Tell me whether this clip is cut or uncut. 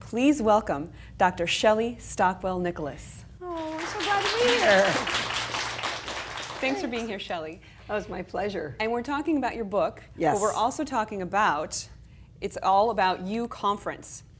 uncut